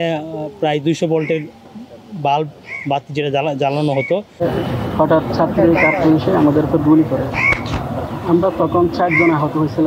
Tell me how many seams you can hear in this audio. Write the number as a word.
one